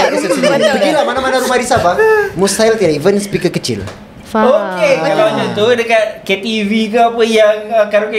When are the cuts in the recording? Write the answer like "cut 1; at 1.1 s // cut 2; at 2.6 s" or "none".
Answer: none